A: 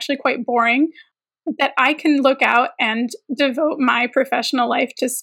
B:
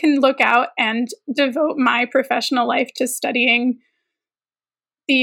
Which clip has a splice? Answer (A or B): A